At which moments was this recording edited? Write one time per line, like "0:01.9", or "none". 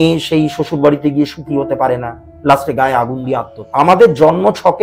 0:03.6